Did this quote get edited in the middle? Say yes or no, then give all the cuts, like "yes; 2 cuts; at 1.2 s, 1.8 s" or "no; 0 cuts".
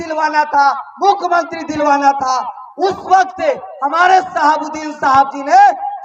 no; 0 cuts